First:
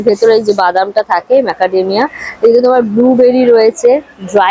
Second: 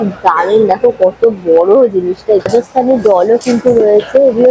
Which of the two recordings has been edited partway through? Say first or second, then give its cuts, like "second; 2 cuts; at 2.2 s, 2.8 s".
second; 1 cut; at 2.5 s